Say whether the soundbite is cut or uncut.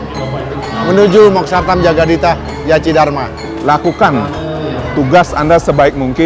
cut